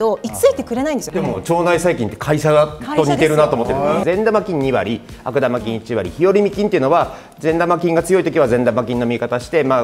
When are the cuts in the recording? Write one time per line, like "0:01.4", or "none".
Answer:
0:01.1
0:04.0